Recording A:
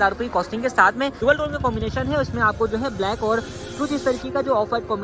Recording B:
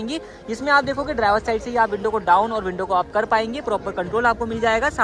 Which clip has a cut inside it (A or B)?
A